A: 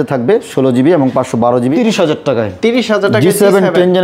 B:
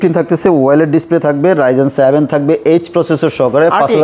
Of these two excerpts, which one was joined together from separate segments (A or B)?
A